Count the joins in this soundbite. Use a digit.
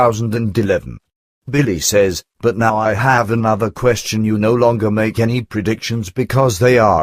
0